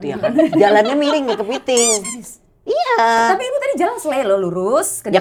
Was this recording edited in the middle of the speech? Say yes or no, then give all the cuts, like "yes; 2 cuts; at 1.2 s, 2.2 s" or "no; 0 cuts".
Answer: no; 0 cuts